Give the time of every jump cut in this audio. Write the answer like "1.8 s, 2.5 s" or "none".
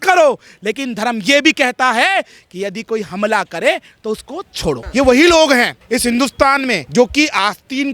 4.8 s, 5.8 s, 6.8 s